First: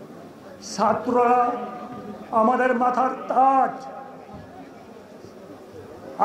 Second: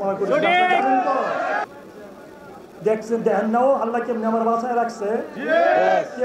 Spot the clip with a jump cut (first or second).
second